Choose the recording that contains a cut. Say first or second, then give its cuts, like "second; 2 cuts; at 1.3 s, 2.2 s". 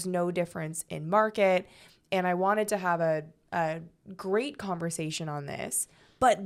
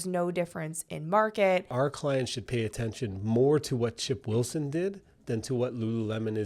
second; 1 cut; at 1.7 s